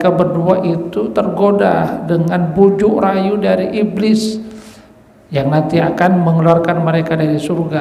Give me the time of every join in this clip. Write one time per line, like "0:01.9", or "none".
none